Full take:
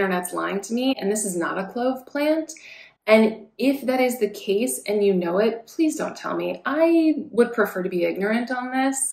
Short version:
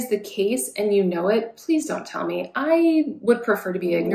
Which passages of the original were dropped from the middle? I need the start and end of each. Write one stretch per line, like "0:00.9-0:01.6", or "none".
none